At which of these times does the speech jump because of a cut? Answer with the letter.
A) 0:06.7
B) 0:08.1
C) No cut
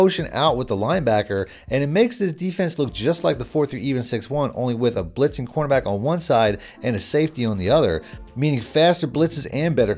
C